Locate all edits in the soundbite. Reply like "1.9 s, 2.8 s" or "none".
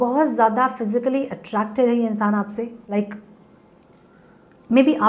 2.9 s